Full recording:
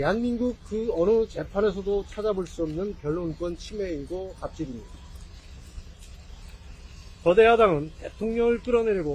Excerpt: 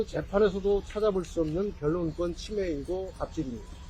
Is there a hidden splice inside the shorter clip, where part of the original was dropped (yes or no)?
no